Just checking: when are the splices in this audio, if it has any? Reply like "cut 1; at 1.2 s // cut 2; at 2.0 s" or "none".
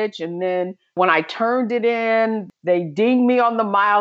cut 1; at 1.0 s // cut 2; at 2.5 s